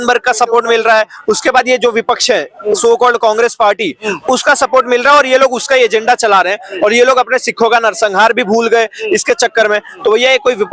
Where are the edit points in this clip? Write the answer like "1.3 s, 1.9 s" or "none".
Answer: none

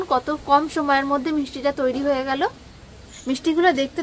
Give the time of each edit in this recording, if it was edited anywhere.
3.1 s

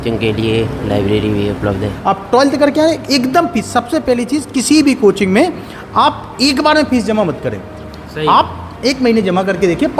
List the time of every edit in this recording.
1.9 s

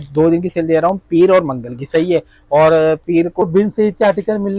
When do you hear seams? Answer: 3.4 s

